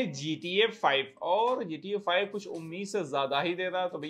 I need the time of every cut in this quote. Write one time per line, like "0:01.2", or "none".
none